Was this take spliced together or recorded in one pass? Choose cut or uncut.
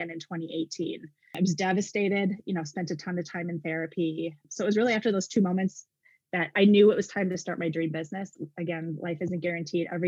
cut